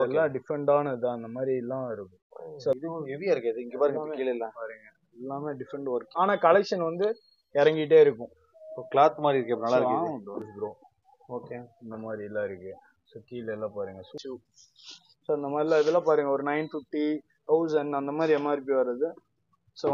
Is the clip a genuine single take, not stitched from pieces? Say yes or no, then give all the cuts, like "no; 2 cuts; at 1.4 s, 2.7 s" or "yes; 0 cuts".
no; 4 cuts; at 2.8 s, 6.1 s, 10.5 s, 14.2 s